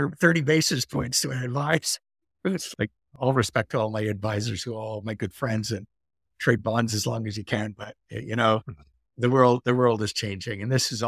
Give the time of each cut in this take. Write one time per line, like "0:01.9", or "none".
0:02.7